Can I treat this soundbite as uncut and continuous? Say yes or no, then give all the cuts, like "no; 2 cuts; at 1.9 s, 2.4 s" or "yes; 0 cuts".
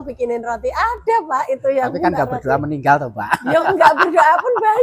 yes; 0 cuts